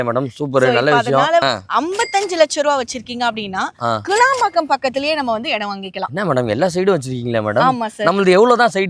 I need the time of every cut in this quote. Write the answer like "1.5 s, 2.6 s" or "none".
1.4 s